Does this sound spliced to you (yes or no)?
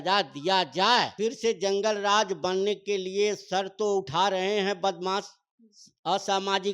yes